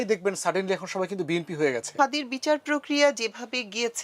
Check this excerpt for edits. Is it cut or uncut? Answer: cut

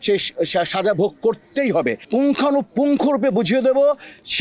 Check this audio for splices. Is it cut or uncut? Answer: cut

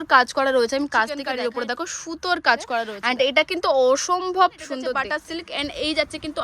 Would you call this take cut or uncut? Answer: cut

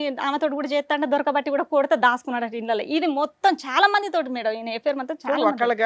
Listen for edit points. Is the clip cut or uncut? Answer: uncut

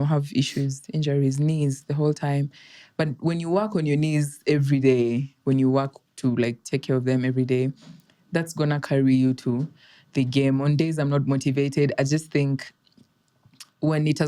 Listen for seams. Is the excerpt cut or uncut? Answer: uncut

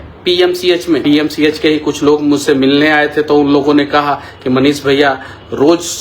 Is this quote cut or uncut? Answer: cut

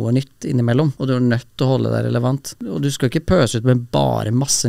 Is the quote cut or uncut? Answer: cut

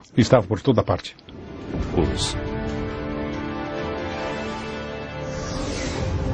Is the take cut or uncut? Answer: uncut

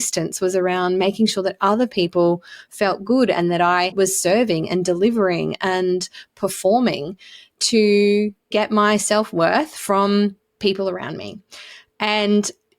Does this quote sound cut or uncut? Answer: cut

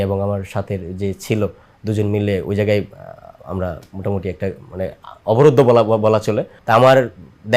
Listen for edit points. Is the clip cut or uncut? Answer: cut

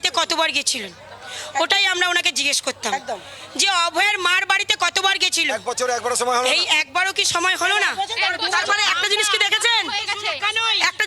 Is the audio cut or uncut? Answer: uncut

